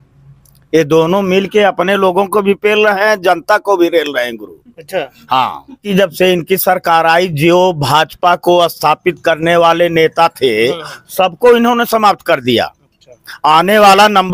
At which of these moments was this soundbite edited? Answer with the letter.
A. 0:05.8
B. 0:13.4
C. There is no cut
A